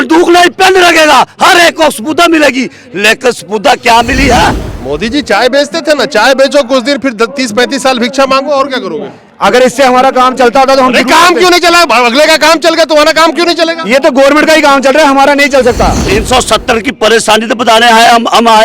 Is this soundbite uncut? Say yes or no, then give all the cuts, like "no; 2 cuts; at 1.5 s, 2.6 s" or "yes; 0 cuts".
no; 2 cuts; at 4.7 s, 16.0 s